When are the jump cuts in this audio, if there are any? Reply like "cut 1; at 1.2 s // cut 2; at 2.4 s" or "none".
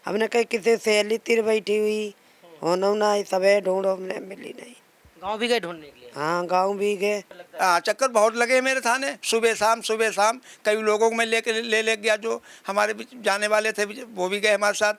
cut 1; at 7.4 s